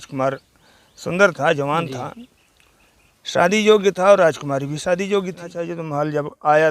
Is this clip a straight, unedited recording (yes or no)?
no